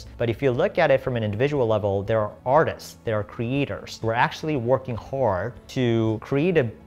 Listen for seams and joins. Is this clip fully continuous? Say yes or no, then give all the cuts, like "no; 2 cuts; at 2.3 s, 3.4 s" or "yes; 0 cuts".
no; 2 cuts; at 4.0 s, 5.8 s